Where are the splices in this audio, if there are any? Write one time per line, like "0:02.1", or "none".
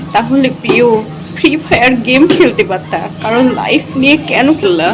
none